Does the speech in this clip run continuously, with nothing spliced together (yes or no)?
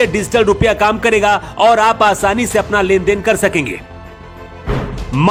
yes